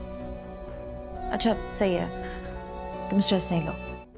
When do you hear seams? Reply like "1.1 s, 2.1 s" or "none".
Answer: 1.1 s